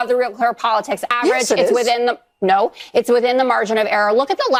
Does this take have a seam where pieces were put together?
no; 0 cuts

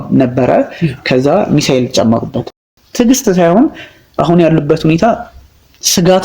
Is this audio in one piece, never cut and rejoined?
no; 1 cut; at 2.7 s

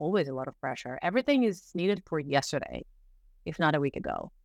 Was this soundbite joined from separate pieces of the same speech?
no; 0 cuts

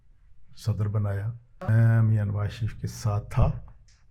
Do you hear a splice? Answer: yes; 1 cut; at 1.7 s

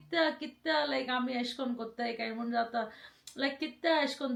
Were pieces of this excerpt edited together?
no; 0 cuts

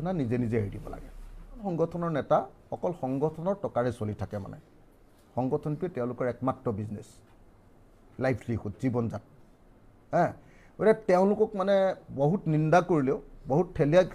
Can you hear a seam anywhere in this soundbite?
yes; 1 cut; at 1.7 s

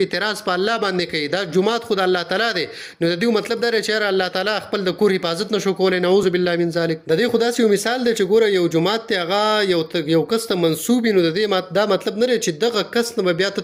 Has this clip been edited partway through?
no; 0 cuts

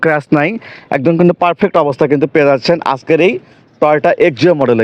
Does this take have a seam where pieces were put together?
no; 0 cuts

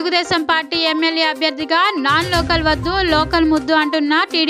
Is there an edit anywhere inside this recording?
no; 0 cuts

